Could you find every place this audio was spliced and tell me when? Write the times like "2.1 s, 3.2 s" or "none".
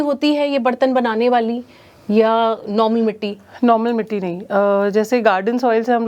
none